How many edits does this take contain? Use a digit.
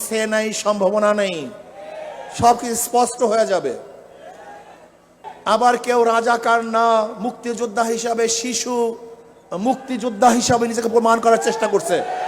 1